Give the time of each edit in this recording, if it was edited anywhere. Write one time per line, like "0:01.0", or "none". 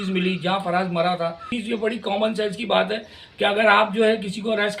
0:01.5